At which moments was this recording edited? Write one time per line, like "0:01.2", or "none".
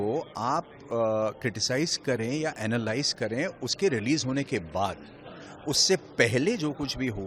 none